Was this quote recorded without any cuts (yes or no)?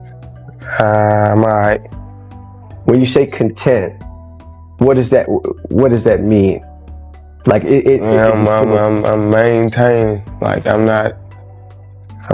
yes